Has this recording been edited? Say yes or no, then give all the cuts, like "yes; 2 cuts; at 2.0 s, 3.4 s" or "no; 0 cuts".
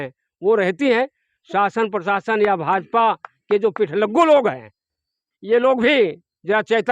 yes; 1 cut; at 1.3 s